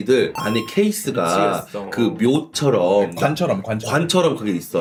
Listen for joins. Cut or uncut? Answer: uncut